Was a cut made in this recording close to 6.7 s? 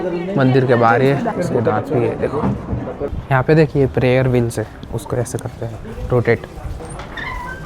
yes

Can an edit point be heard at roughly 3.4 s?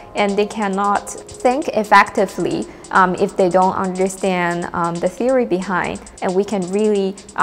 no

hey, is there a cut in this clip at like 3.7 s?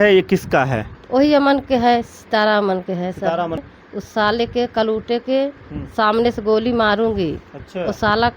yes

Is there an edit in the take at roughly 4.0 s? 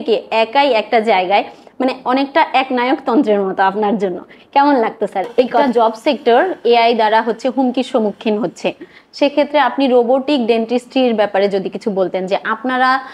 no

